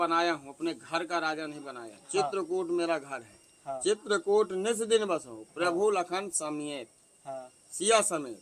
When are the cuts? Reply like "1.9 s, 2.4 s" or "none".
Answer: none

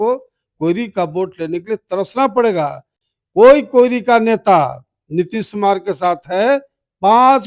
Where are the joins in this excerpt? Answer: none

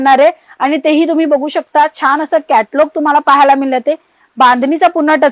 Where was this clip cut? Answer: none

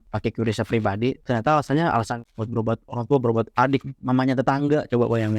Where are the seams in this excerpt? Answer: 1.2 s, 3.9 s

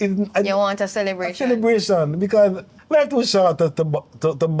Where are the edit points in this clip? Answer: 2.7 s

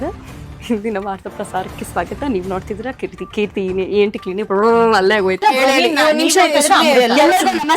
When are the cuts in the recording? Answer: none

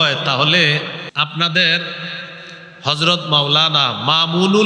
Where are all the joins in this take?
1.1 s

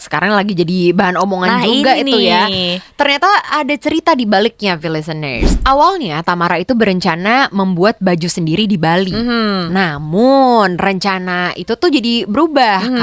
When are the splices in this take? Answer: 5.4 s

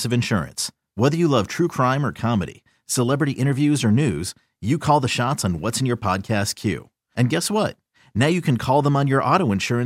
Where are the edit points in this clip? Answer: none

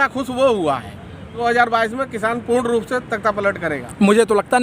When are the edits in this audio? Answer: 1.4 s

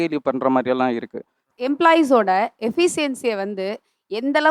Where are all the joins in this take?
1.4 s

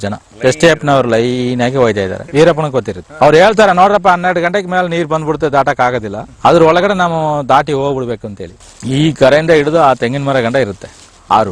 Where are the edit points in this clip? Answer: 2.2 s, 8.6 s

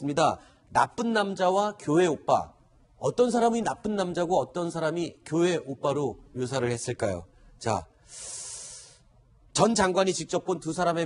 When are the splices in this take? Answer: none

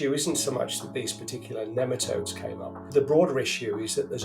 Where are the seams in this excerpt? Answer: 2.9 s

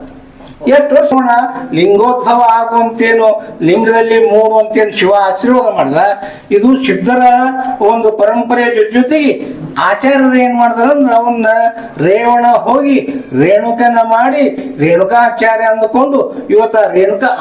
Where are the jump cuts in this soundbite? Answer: 1.1 s

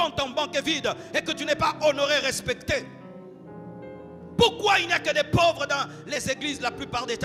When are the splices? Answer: none

